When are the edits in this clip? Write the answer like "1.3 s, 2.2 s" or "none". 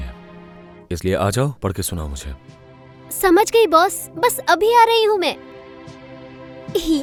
none